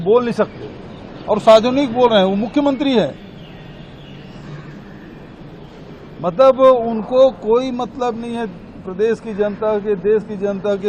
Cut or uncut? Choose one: uncut